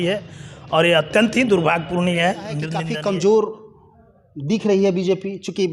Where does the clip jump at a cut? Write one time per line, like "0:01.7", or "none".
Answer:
0:02.7